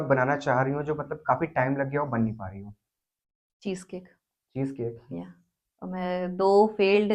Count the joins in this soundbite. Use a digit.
0